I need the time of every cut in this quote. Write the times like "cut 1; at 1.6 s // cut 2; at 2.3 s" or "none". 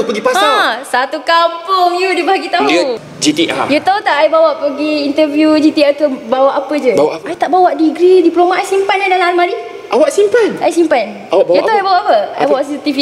cut 1; at 3.0 s